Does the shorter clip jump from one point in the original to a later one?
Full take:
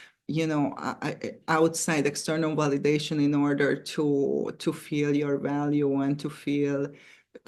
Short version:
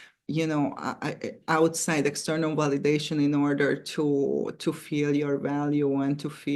no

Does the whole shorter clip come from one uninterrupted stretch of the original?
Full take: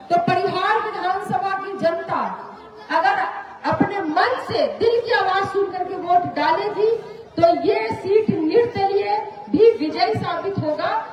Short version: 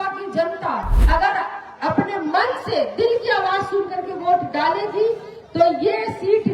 no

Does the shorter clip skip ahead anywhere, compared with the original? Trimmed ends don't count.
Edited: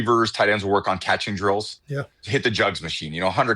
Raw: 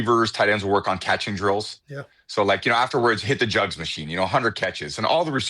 yes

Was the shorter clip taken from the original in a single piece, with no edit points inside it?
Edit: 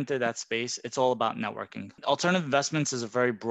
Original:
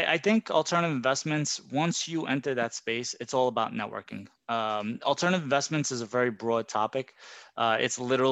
no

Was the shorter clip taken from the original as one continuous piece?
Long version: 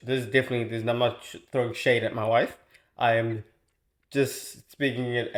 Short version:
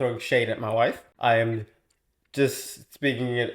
no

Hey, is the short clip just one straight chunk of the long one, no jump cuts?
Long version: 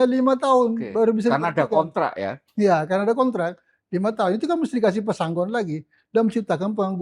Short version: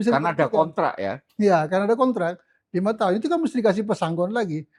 yes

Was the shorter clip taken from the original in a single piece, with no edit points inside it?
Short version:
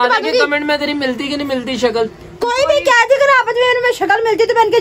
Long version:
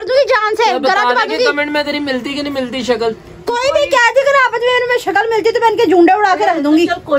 yes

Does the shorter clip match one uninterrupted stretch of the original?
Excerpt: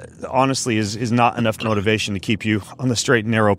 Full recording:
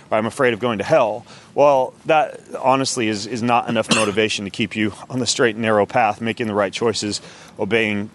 yes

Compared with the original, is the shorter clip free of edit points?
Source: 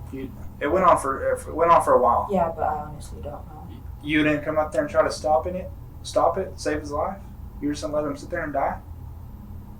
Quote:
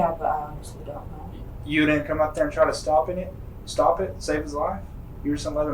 yes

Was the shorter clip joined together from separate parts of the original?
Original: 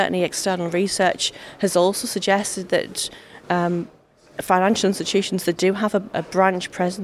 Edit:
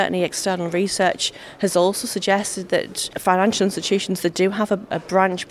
yes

